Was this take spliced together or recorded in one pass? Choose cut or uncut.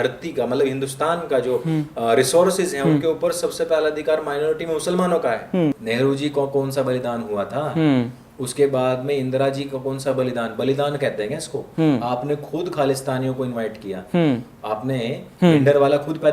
cut